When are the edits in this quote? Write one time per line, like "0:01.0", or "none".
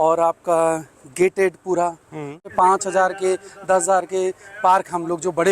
0:02.5